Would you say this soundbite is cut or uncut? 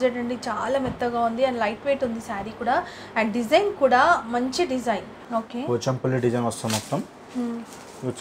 cut